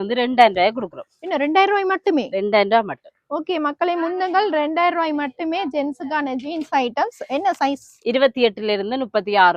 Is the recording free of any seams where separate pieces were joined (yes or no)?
yes